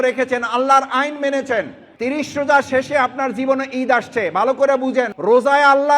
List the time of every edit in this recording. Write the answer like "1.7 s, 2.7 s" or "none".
1.8 s, 5.1 s